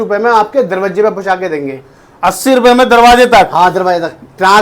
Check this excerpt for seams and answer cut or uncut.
uncut